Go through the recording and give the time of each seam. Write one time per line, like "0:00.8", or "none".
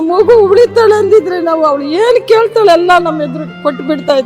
none